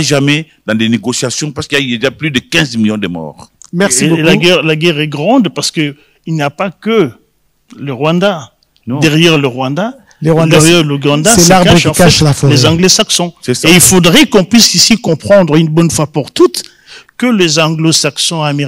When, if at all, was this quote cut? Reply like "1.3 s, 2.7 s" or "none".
none